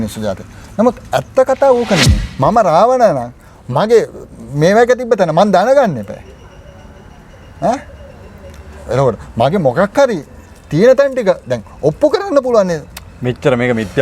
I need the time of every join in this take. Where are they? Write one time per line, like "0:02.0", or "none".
0:02.2